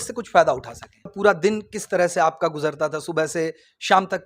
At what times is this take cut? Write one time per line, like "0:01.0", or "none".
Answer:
0:01.1